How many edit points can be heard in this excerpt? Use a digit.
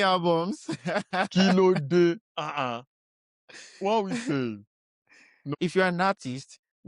1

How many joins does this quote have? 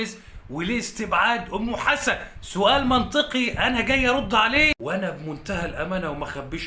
1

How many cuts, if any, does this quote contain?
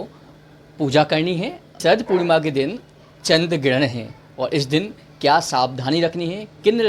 1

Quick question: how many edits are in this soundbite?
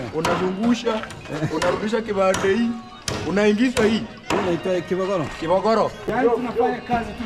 1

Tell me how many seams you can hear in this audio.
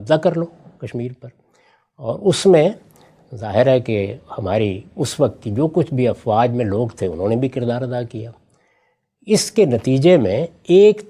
0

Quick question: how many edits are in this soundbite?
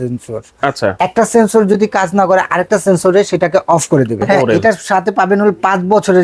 1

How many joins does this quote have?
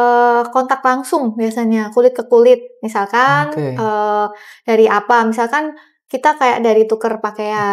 0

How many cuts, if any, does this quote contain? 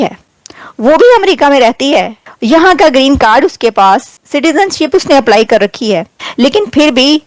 1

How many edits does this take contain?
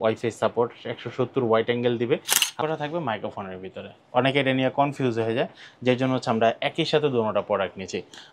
1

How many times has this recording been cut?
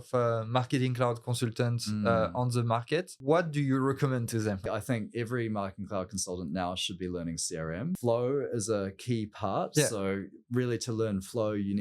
3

